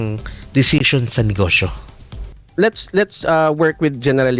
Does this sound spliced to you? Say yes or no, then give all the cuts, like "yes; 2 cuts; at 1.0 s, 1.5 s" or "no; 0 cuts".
yes; 1 cut; at 2.4 s